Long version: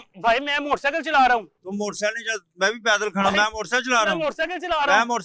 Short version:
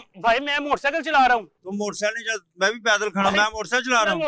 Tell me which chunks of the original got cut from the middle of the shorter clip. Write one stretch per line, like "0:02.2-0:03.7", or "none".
none